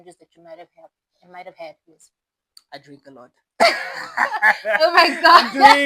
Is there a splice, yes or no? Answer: no